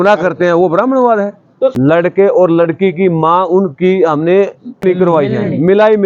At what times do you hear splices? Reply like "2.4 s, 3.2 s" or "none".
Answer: 2.0 s, 4.8 s